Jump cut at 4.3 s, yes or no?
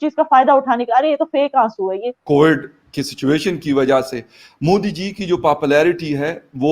no